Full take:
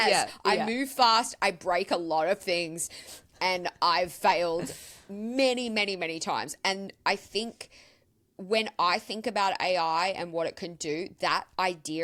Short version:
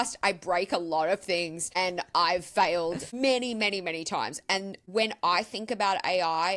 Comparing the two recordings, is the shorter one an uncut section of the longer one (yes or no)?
no